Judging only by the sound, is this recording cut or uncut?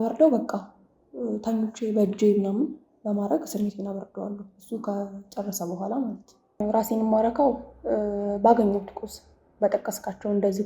cut